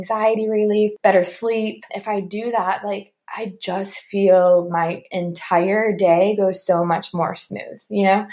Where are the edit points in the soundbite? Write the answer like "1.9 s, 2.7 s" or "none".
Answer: 1.9 s